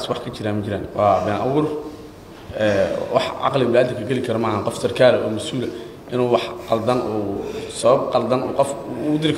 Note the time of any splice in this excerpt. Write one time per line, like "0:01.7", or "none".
none